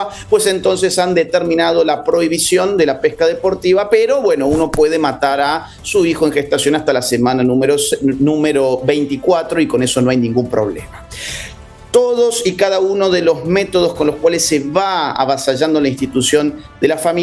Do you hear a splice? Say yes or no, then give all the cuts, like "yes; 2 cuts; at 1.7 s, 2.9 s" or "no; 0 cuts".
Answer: no; 0 cuts